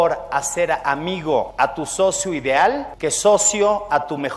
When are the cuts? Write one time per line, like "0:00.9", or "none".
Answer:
0:01.5
0:02.9